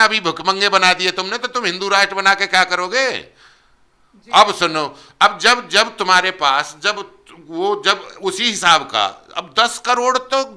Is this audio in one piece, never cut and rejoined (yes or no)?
yes